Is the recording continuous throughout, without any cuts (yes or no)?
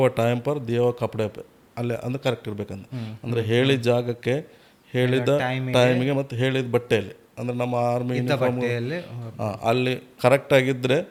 yes